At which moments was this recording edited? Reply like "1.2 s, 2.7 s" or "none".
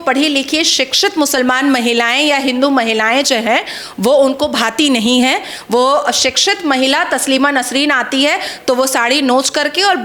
none